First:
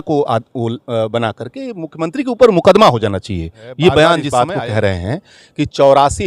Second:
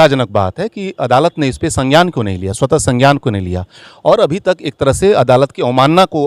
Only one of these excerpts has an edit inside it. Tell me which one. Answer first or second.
first